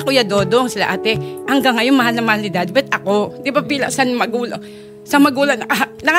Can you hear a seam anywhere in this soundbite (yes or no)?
no